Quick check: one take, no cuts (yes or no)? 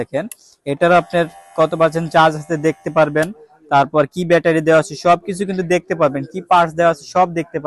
yes